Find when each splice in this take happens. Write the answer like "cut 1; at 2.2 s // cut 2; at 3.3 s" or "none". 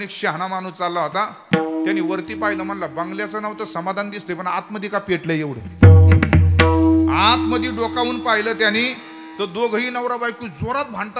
none